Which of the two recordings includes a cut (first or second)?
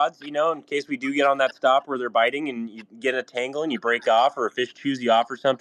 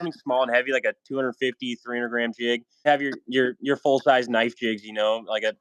second